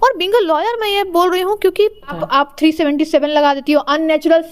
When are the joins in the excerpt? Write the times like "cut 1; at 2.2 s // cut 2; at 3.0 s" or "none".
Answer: cut 1; at 2.2 s

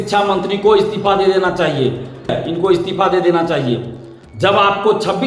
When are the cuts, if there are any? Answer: cut 1; at 2.4 s

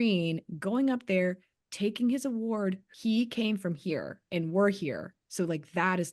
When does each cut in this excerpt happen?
cut 1; at 2.8 s

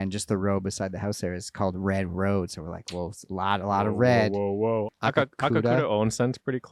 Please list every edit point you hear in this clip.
cut 1; at 4.9 s

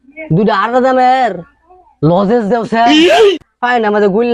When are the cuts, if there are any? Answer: none

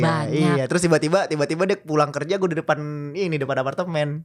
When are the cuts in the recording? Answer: none

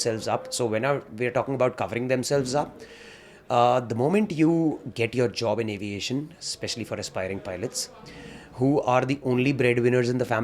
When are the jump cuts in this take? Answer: none

